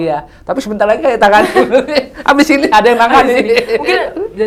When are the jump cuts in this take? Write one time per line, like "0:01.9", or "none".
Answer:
none